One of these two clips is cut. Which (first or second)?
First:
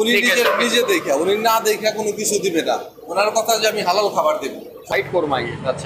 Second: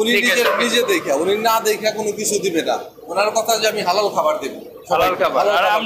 first